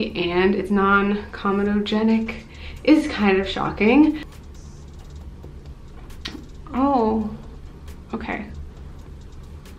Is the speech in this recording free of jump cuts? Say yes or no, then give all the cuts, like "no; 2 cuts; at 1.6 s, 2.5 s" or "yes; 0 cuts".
yes; 0 cuts